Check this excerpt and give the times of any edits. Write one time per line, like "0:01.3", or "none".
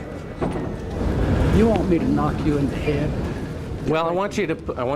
0:00.9